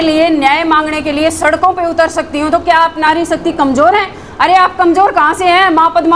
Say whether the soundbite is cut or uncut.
uncut